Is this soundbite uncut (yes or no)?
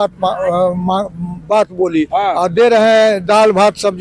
yes